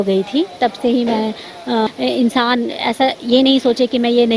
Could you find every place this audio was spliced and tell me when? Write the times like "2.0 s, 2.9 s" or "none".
1.9 s